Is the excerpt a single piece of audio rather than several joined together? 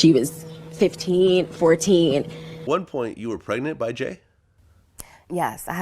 no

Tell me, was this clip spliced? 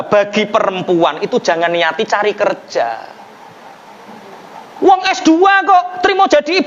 no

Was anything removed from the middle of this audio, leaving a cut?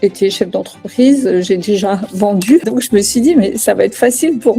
yes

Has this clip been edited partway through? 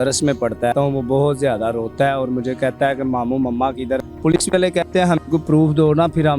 yes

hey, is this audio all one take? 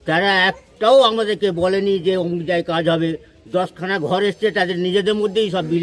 yes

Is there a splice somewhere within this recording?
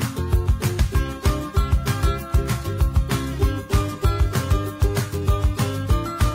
no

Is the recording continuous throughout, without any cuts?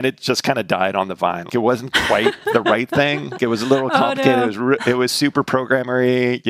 no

